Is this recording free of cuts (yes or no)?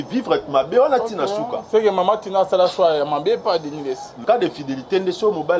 no